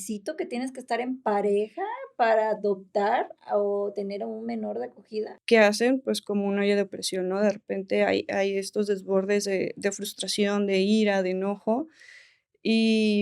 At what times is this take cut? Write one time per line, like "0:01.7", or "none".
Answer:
0:05.2